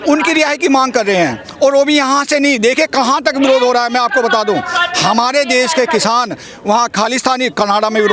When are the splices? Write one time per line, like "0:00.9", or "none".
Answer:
none